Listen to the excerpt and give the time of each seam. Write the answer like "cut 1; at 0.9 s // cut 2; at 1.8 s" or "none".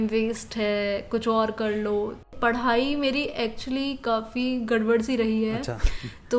cut 1; at 2.3 s